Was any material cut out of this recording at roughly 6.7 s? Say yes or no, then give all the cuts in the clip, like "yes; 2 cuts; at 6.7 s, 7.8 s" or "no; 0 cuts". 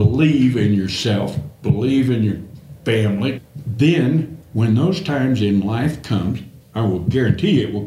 yes; 1 cut; at 6.7 s